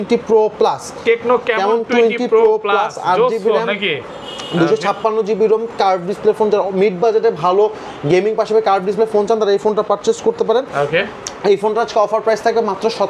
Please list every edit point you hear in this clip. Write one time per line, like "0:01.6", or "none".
none